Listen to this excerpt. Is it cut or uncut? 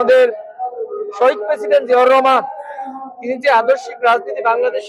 uncut